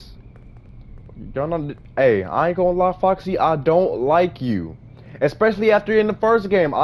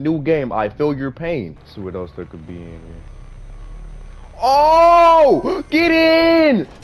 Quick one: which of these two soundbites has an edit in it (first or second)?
second